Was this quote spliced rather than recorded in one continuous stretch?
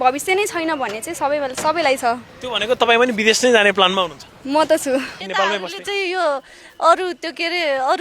yes; 1 cut; at 5.2 s

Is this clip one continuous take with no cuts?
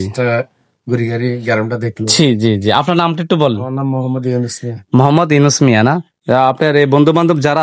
yes; 0 cuts

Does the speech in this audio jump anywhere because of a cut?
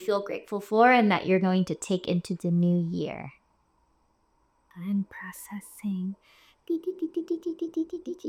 no; 0 cuts

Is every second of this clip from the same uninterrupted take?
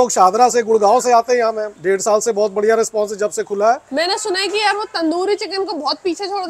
yes; 0 cuts

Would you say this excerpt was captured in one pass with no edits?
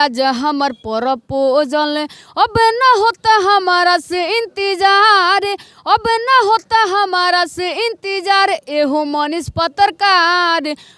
yes; 0 cuts

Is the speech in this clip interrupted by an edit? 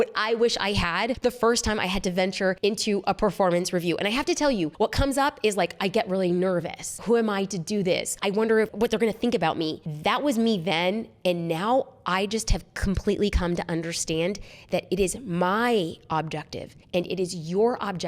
yes; 5 cuts; at 1.2 s, 2.6 s, 4.7 s, 7.0 s, 8.5 s

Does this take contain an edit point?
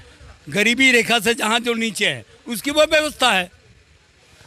no; 0 cuts

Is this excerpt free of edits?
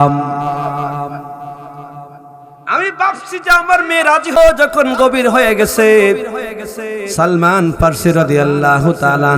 no; 1 cut; at 4.4 s

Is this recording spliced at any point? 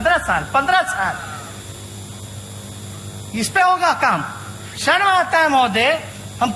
no; 0 cuts

